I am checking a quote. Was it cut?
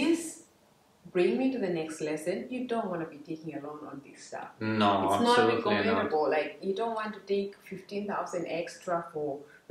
no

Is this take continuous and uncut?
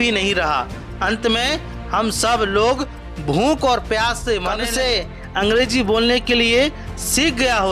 no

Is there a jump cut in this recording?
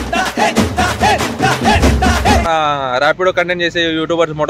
yes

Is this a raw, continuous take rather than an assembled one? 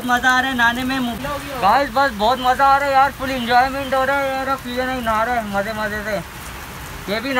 no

